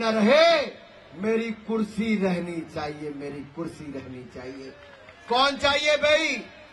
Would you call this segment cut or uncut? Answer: uncut